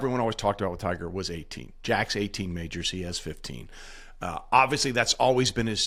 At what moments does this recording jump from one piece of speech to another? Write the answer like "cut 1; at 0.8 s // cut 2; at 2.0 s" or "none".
none

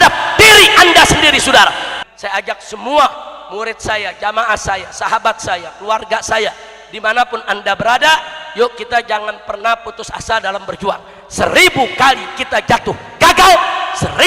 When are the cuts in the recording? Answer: cut 1; at 1.9 s

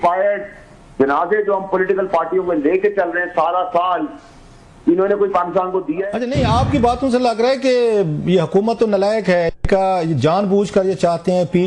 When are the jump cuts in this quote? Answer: cut 1; at 6.0 s

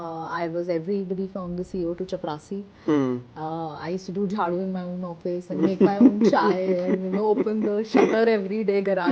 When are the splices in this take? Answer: none

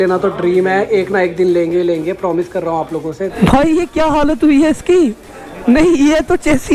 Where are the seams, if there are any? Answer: cut 1; at 3.3 s

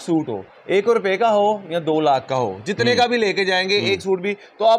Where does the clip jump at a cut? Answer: none

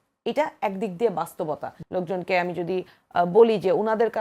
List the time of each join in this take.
cut 1; at 1.7 s

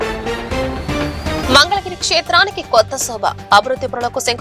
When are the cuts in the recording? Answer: cut 1; at 1.4 s

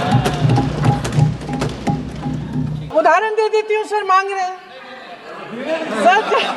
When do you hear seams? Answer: cut 1; at 2.9 s

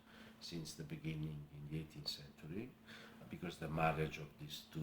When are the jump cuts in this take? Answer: cut 1; at 3.2 s

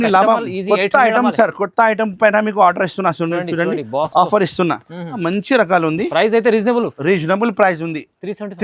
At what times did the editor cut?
cut 1; at 5.2 s

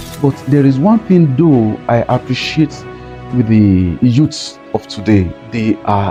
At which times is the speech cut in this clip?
none

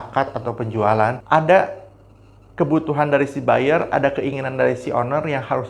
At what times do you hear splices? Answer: cut 1; at 1.2 s

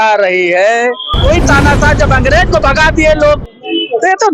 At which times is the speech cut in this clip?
cut 1; at 1.2 s

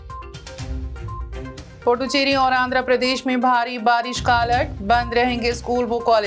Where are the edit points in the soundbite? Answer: cut 1; at 1.0 s // cut 2; at 1.5 s

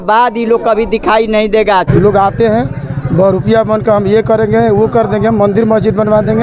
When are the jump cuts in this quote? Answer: cut 1; at 1.9 s

